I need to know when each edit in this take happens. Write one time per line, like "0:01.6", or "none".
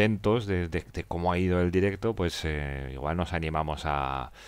none